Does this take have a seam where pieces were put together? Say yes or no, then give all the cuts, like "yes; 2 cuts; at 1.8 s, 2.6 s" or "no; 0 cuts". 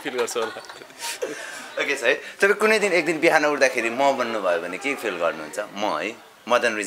no; 0 cuts